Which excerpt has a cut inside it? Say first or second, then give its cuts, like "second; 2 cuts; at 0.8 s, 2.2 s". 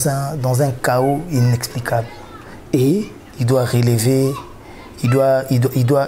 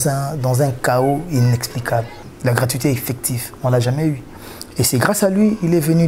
second; 1 cut; at 2.2 s